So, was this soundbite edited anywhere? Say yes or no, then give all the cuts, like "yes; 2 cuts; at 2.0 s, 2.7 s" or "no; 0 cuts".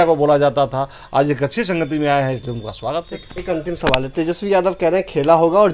no; 0 cuts